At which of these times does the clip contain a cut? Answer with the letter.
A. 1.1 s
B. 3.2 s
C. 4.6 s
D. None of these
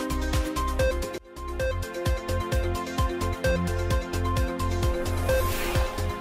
A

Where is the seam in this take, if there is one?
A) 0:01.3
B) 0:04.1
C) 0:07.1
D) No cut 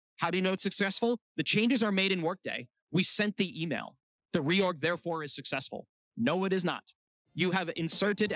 A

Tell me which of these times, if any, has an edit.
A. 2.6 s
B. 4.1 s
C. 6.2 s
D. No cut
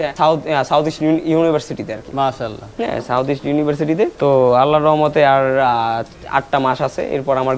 D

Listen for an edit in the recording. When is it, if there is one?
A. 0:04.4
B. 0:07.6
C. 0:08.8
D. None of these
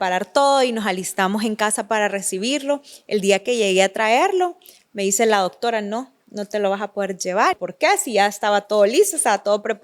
B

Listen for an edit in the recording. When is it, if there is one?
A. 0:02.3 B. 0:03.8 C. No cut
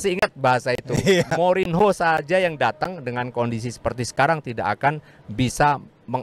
C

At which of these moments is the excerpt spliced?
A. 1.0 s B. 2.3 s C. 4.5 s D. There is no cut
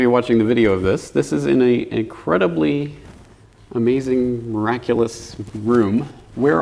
C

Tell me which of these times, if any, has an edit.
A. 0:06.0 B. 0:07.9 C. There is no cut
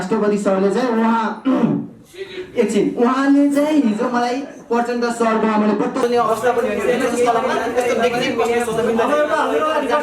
A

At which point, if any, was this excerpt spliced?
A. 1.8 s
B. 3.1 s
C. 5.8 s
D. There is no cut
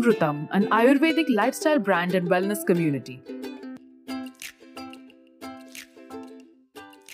B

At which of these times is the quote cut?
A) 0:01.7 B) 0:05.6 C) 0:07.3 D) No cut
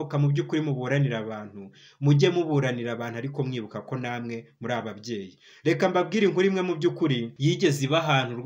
C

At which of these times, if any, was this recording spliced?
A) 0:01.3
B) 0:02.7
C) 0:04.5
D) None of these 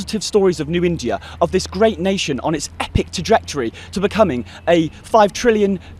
D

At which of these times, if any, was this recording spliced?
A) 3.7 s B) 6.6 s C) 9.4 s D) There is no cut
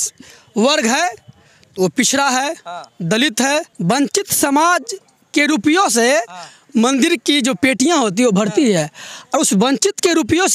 A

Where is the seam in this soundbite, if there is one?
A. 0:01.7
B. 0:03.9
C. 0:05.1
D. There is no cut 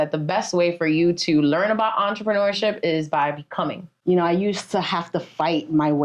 B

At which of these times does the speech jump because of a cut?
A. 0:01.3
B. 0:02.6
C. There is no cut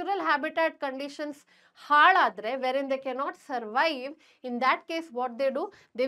C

